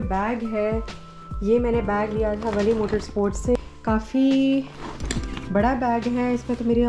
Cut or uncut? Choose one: uncut